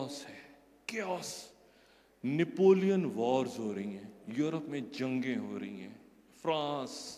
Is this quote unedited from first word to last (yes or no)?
yes